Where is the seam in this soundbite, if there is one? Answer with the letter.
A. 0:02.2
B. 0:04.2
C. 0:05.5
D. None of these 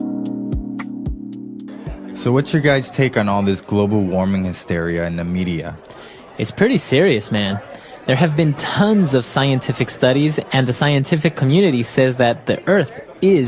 A